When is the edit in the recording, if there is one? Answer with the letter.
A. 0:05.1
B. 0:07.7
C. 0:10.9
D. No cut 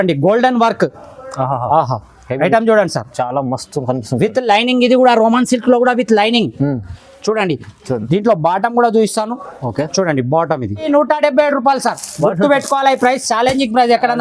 C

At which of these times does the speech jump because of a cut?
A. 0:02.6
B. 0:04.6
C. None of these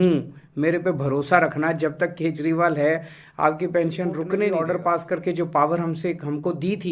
B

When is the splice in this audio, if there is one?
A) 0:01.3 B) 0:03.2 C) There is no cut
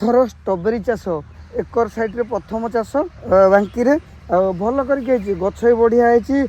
A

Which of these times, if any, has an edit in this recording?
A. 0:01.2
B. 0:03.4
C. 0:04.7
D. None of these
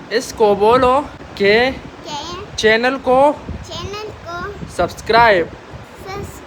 A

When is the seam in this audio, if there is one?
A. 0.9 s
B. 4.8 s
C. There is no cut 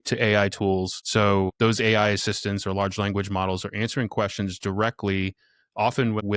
A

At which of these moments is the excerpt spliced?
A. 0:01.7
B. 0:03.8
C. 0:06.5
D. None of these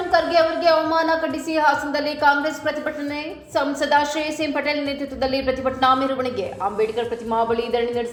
D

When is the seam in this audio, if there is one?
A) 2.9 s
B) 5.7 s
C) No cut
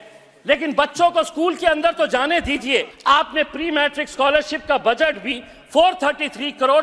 A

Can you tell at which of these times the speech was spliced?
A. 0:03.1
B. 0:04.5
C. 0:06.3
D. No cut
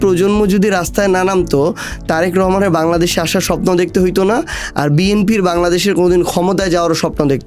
D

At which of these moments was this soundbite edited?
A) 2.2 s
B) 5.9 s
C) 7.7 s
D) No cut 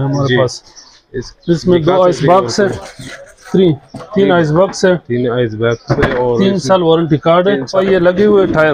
C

